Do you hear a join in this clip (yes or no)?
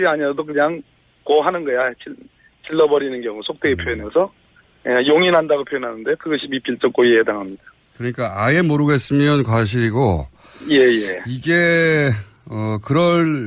yes